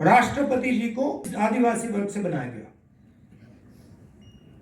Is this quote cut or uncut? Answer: cut